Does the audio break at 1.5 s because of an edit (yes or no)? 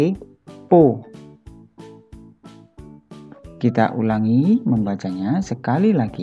no